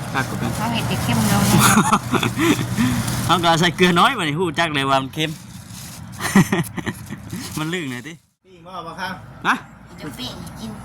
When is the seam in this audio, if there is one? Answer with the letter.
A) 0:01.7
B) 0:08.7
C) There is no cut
B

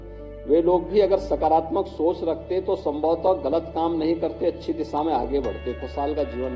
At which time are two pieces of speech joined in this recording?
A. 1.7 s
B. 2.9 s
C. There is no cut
C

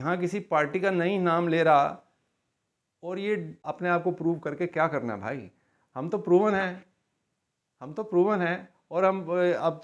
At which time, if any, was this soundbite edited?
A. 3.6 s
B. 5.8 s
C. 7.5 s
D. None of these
A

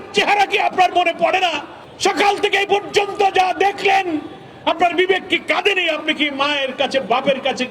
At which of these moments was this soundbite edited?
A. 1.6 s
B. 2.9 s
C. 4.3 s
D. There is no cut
D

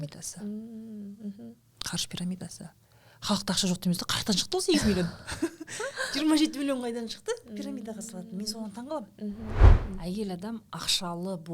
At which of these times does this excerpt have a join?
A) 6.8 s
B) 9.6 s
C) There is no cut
B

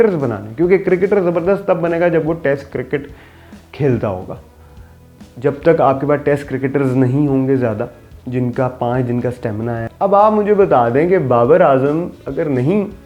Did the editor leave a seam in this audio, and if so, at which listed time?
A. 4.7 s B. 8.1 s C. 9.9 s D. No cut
C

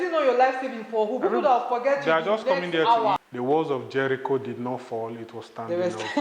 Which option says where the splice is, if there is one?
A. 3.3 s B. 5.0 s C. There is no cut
A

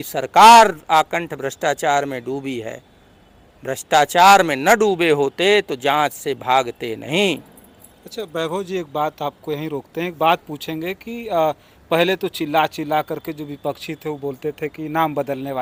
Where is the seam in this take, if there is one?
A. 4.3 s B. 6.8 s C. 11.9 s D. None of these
D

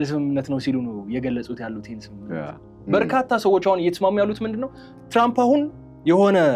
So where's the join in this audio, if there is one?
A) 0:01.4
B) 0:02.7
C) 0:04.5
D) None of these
B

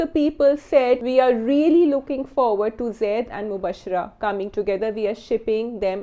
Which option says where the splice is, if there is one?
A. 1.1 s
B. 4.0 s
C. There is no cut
A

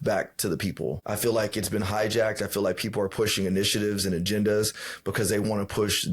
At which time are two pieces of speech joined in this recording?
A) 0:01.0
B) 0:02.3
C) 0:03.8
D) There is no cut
A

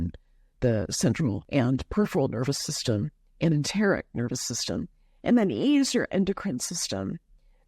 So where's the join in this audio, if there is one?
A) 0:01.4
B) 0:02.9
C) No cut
A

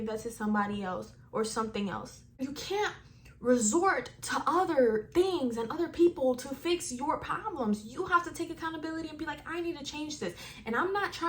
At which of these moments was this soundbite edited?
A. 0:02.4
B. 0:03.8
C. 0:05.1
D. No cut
A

